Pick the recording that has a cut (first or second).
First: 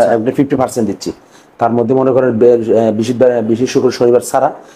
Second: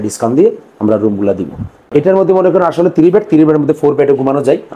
second